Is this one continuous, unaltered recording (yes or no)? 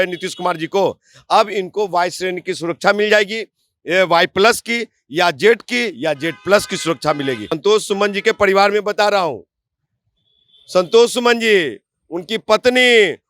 no